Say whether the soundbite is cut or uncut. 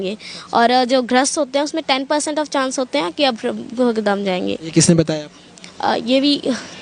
uncut